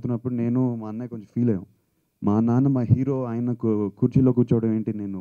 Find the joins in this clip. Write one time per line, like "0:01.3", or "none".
none